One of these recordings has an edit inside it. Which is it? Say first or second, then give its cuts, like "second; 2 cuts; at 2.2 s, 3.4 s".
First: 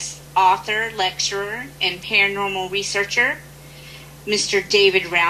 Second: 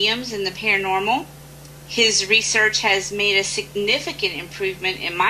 first; 1 cut; at 3.7 s